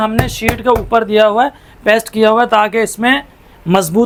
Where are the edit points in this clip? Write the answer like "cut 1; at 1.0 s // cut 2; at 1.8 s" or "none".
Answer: none